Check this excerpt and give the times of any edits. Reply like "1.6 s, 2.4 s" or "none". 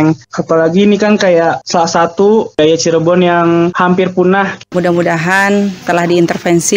4.6 s, 5.8 s